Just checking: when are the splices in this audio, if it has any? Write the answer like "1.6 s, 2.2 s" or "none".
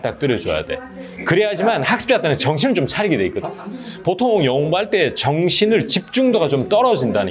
none